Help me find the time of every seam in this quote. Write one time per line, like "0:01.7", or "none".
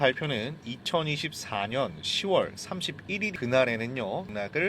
0:03.3

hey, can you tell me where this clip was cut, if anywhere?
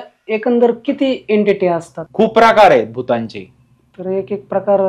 0:02.0

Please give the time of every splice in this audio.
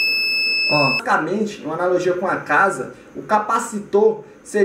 0:01.0

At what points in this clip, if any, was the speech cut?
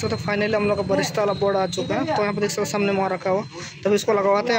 none

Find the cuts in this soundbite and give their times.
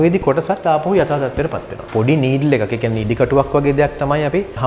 0:01.8

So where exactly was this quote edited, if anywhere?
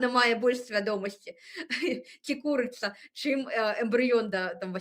none

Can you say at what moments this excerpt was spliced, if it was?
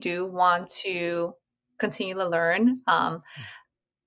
none

